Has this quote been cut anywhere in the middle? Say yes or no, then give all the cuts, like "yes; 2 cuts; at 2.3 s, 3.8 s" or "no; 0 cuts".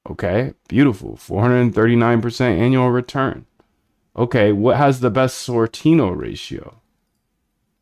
yes; 1 cut; at 4.3 s